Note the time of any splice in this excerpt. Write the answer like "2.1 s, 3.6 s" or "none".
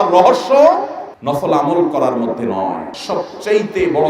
2.9 s